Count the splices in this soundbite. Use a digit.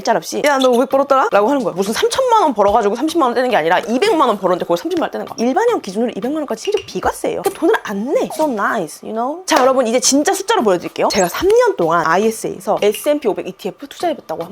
4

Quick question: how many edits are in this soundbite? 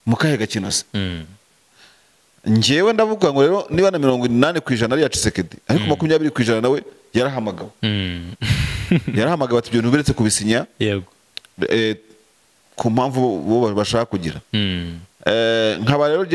0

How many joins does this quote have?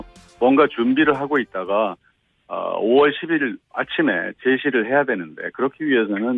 0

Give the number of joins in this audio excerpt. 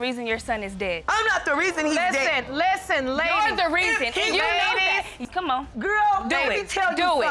1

